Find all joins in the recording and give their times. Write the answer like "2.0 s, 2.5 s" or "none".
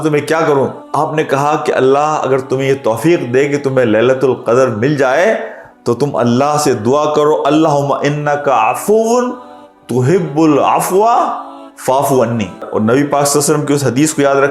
12.6 s